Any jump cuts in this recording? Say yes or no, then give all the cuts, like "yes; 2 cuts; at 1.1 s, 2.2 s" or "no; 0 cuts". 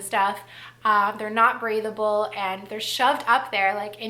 no; 0 cuts